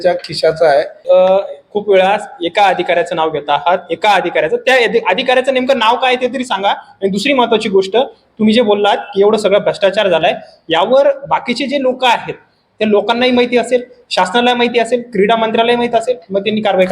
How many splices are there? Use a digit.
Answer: 1